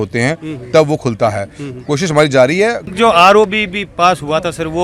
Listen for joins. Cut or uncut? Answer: cut